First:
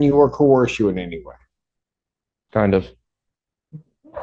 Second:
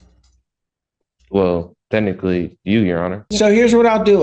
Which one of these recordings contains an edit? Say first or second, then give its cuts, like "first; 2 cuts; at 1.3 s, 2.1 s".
second; 1 cut; at 3.3 s